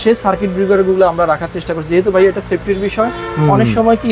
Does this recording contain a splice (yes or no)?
no